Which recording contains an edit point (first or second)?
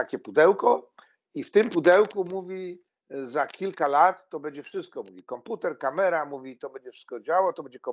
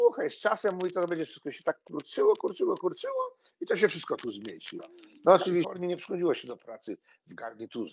second